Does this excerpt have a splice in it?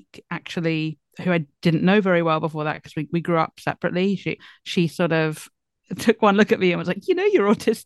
no; 0 cuts

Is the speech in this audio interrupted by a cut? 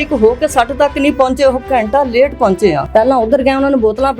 yes; 1 cut; at 2.8 s

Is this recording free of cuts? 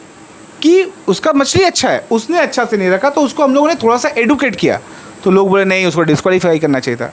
yes; 0 cuts

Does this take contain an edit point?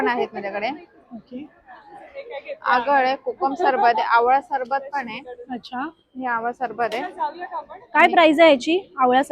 no; 0 cuts

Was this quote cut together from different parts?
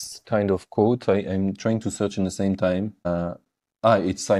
no; 0 cuts

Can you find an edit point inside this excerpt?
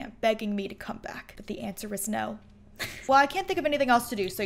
yes; 1 cut; at 3.0 s

